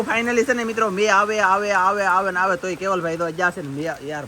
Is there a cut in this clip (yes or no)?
no